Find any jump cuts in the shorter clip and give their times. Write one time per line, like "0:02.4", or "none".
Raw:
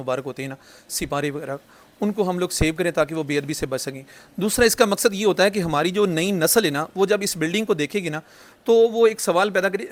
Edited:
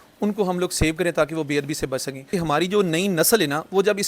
0:02.3